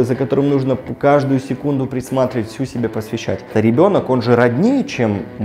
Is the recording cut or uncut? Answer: cut